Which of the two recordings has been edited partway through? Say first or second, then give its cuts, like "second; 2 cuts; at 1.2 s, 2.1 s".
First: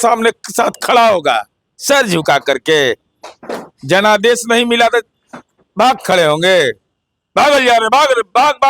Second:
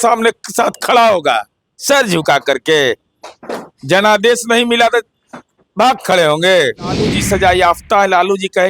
second; 1 cut; at 7.1 s